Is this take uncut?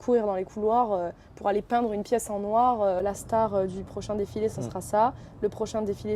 no; 1 cut; at 3.0 s

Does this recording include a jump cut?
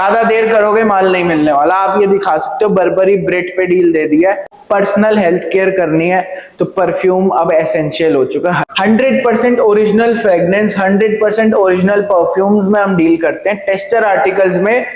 yes; 2 cuts; at 4.5 s, 8.6 s

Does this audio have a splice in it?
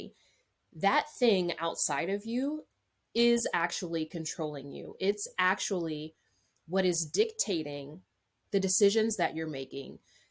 no; 0 cuts

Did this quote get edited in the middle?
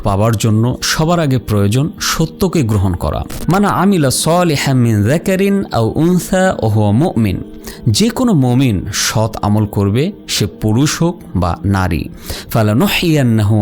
yes; 1 cut; at 3.3 s

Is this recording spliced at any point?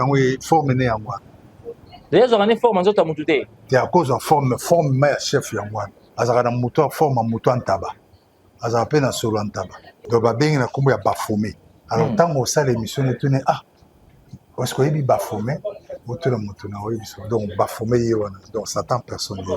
yes; 1 cut; at 9.9 s

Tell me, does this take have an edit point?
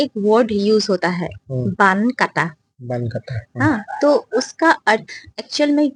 no; 0 cuts

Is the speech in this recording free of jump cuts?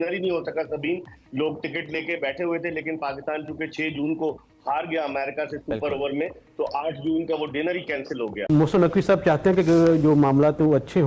no; 1 cut; at 8.4 s

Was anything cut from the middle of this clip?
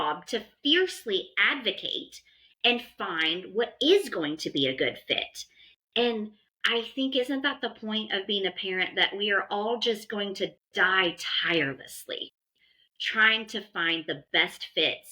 no; 0 cuts

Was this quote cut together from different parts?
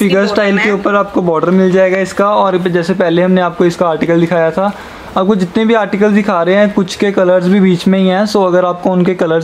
no; 0 cuts

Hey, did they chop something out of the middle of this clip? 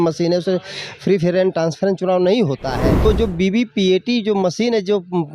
yes; 1 cut; at 3.0 s

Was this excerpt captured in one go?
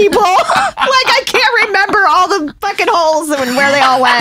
yes; 0 cuts

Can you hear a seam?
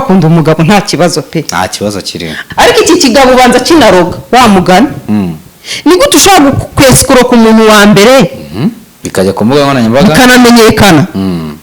yes; 1 cut; at 2.4 s

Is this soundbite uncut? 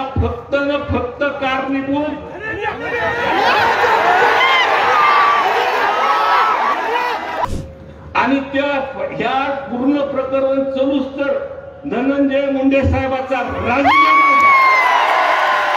no; 1 cut; at 7.5 s

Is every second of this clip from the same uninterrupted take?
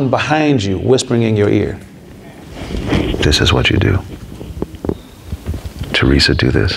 yes; 0 cuts

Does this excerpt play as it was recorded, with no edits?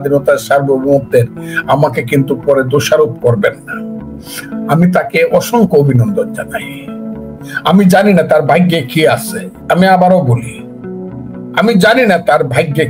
yes; 0 cuts

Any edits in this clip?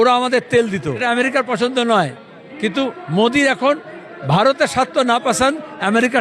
yes; 1 cut; at 1.0 s

